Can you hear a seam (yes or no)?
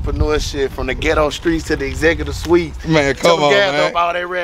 no